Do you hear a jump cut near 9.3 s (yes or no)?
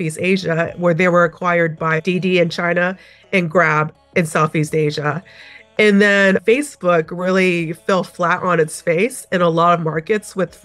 no